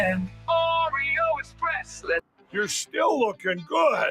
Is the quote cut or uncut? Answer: cut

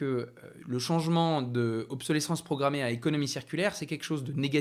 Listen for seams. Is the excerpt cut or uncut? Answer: uncut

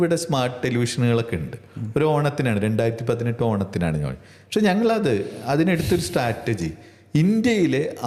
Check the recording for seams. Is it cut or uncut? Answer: uncut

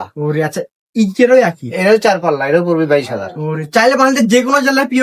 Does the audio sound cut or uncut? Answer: uncut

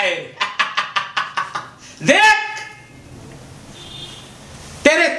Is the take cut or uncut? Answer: uncut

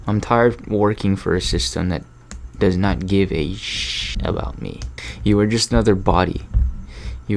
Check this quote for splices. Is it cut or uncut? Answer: uncut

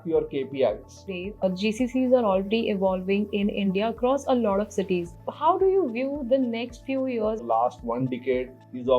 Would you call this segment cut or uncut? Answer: cut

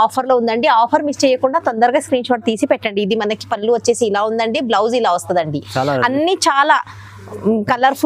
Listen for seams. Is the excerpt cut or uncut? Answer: uncut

